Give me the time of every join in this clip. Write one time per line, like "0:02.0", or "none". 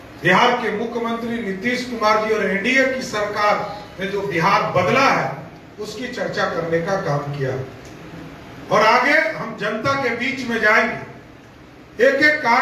none